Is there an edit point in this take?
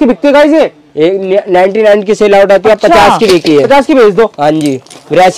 no; 0 cuts

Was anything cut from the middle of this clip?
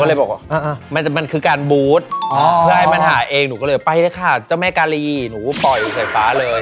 no; 0 cuts

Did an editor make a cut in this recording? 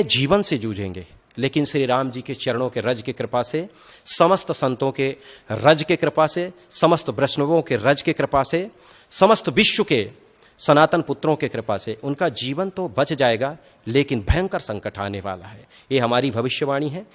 no; 0 cuts

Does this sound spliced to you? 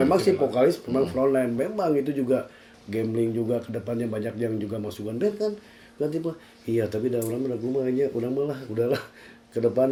no; 0 cuts

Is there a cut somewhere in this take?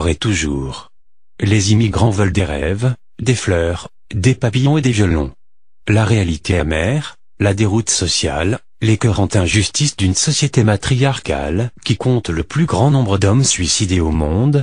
no; 0 cuts

